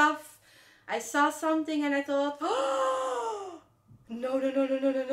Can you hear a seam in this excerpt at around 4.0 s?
no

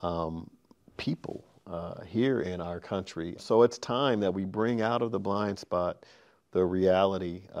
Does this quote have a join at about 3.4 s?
yes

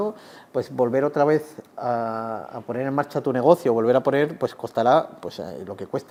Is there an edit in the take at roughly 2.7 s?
no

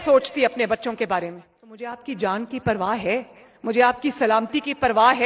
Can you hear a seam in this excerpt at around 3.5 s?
no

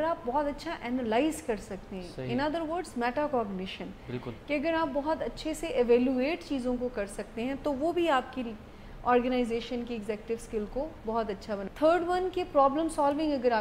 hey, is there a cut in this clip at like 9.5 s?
no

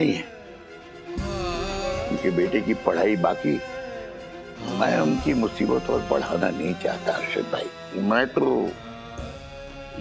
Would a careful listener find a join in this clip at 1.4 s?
no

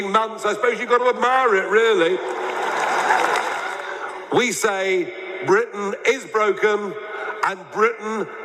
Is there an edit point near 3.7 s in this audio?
yes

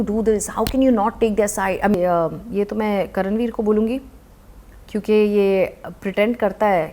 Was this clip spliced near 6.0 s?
no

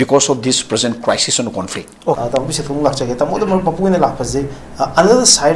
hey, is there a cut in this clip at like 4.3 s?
no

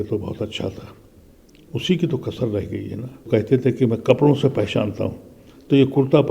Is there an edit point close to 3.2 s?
yes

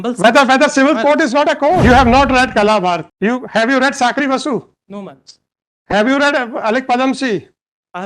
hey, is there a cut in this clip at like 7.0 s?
no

